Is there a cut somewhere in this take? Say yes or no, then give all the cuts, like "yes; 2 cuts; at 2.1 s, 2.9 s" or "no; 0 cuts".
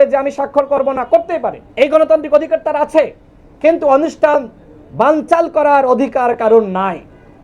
yes; 1 cut; at 1.6 s